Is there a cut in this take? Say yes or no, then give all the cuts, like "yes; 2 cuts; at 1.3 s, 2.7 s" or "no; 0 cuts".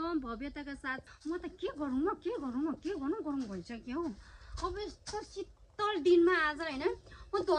yes; 1 cut; at 1.1 s